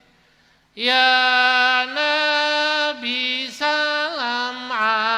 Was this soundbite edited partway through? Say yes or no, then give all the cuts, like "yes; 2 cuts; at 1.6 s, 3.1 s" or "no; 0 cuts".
no; 0 cuts